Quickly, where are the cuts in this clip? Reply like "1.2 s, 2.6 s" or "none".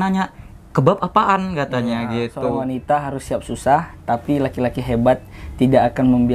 2.7 s